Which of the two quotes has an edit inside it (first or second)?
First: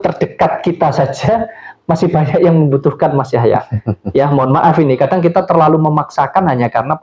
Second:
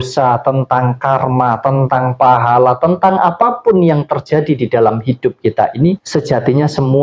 second